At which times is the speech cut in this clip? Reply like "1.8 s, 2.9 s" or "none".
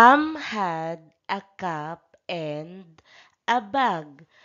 1.3 s